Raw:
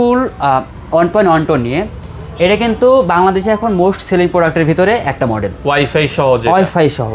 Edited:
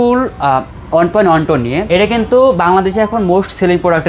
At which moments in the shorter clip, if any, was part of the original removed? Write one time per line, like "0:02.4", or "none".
0:01.8